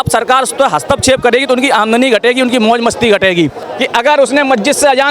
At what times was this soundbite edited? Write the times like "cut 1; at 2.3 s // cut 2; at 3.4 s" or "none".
cut 1; at 3.6 s